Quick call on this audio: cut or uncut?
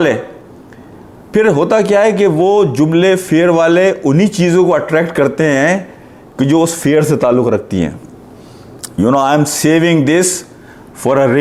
uncut